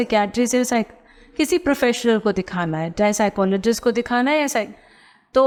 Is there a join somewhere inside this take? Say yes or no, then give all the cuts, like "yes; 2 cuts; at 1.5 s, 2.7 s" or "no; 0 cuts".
no; 0 cuts